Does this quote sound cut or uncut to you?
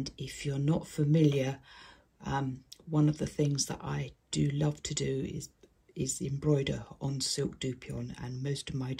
uncut